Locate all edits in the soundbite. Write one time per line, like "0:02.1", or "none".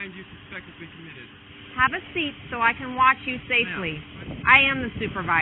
0:01.4
0:04.3